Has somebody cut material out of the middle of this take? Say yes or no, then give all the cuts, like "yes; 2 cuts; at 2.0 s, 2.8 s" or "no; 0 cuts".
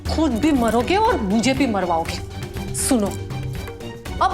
no; 0 cuts